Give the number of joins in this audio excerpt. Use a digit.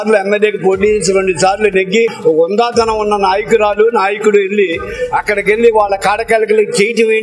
1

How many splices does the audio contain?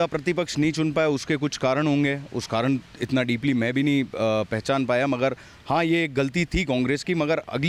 0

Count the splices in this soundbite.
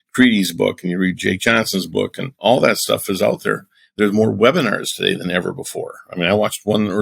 1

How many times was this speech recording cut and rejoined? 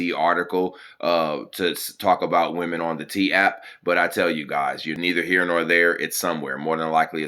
1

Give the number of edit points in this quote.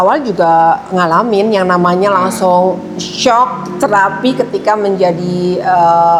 0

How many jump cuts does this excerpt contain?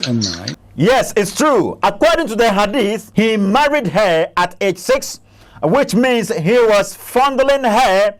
1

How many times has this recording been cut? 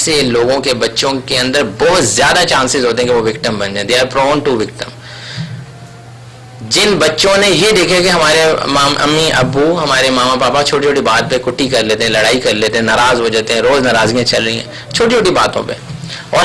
0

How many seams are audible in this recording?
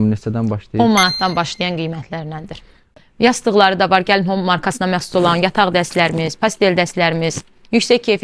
1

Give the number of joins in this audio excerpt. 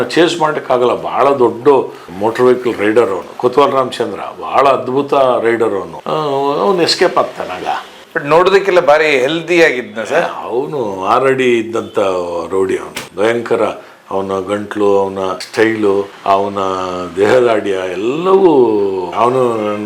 0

